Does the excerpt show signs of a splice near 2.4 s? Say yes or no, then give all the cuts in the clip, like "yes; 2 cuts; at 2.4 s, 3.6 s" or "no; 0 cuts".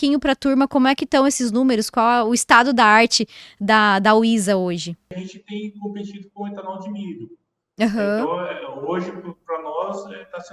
no; 1 cut; at 5.1 s